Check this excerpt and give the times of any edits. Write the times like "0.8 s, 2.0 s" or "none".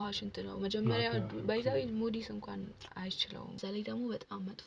3.6 s